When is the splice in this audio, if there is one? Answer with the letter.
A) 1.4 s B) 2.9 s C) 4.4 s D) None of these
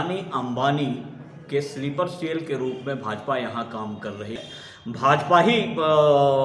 C